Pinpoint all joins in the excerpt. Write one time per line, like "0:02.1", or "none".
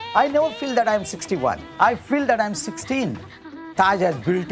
0:01.6
0:03.6